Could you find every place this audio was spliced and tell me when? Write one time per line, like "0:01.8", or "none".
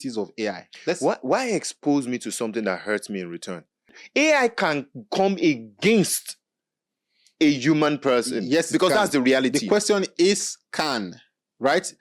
0:03.9